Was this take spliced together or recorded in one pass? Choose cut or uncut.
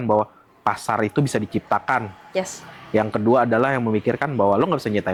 uncut